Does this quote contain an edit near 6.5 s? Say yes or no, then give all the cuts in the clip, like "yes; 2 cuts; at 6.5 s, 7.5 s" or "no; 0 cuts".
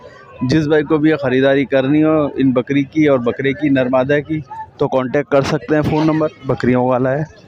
yes; 1 cut; at 6.5 s